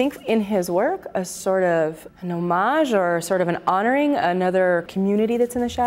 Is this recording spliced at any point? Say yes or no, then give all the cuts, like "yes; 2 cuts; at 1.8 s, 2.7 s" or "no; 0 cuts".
yes; 2 cuts; at 2.1 s, 4.9 s